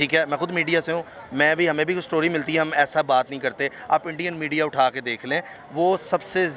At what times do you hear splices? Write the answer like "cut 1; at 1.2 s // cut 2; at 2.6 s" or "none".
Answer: none